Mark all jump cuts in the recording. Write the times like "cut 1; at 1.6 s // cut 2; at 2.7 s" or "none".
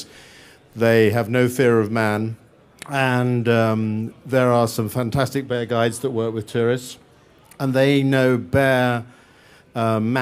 cut 1; at 4.6 s

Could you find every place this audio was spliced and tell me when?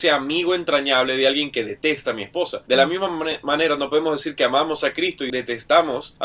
cut 1; at 5.2 s

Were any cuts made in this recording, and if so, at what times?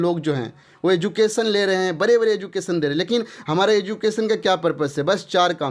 none

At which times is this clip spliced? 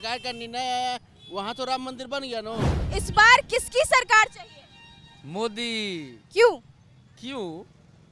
cut 1; at 2.8 s

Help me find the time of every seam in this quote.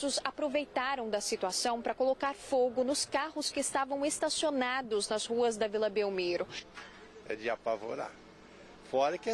cut 1; at 6.6 s

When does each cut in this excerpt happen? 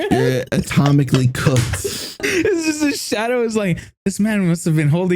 cut 1; at 2.2 s

